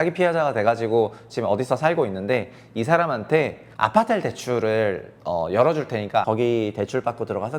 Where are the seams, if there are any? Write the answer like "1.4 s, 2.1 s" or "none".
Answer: 3.6 s, 5.1 s, 6.2 s